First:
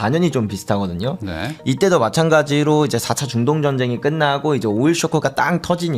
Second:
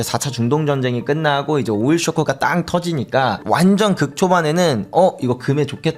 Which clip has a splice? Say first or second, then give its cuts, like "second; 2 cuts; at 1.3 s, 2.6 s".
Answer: first; 1 cut; at 1.6 s